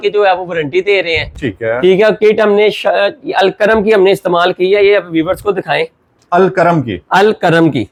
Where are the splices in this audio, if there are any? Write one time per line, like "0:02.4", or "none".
none